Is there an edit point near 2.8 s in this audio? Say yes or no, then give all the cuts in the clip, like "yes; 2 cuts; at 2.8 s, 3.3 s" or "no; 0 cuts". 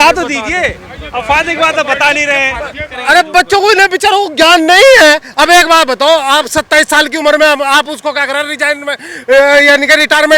yes; 1 cut; at 2.8 s